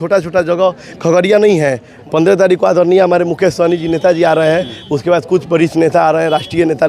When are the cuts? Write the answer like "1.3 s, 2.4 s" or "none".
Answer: 1.9 s